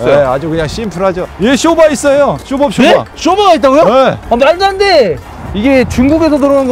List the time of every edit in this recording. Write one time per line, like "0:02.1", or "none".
0:01.3
0:05.2